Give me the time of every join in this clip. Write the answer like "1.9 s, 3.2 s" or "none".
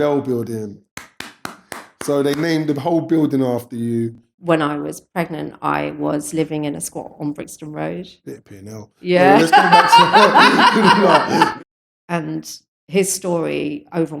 4.3 s, 11.5 s